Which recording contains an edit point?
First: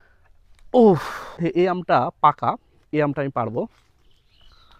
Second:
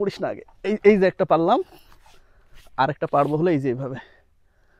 first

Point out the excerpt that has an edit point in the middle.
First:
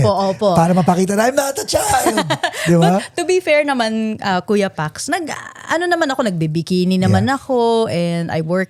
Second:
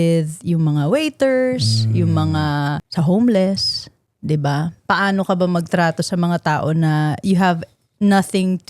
second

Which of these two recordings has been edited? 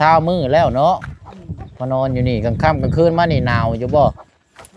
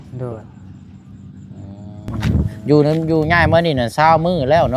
second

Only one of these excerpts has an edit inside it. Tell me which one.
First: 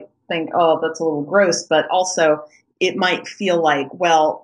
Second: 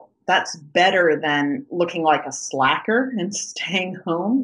first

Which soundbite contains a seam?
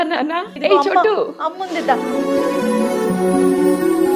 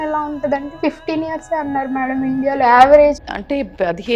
second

